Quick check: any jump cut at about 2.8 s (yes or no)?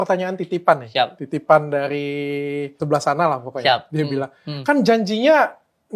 yes